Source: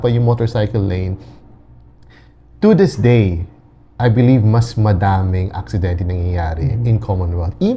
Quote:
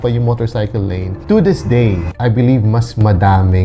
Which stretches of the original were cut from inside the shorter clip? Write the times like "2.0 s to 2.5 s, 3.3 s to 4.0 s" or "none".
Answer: 1.1 s to 2.5 s, 3.4 s to 3.9 s